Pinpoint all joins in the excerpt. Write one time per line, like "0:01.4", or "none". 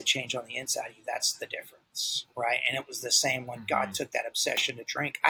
none